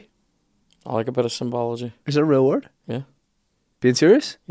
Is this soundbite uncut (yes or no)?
yes